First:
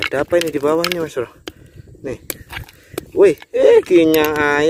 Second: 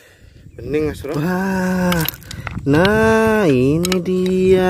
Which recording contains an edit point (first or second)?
second